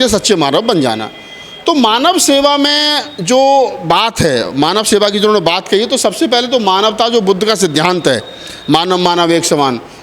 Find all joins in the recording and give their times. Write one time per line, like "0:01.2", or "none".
none